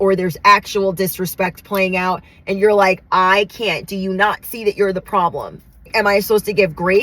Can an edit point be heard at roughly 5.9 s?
yes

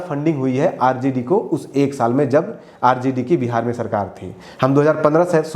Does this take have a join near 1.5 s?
no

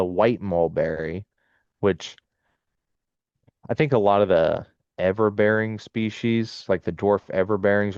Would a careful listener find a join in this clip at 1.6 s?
no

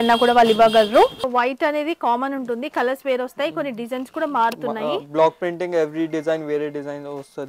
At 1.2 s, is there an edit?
yes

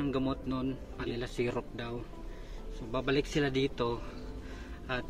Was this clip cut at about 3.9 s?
no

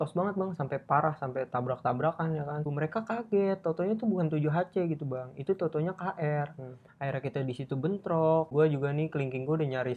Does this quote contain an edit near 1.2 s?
no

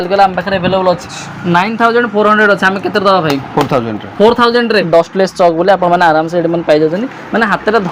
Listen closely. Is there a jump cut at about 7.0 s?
no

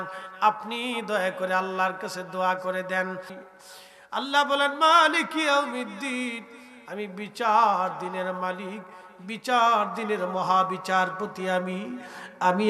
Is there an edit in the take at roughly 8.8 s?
no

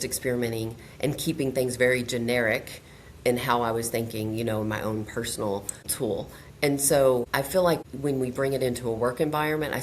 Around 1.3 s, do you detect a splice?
no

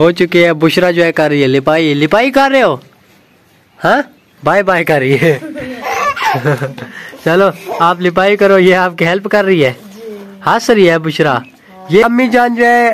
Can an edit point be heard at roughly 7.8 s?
no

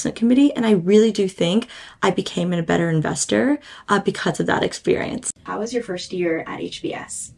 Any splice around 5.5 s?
yes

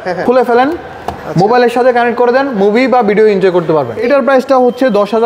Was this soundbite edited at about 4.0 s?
yes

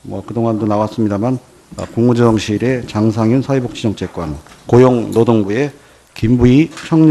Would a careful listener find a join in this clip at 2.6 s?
yes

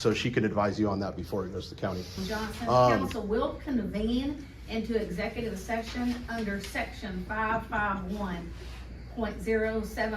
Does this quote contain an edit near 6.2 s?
no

